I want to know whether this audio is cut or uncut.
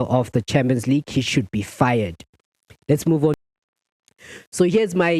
cut